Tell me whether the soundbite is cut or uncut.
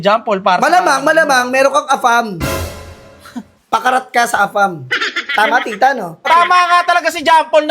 cut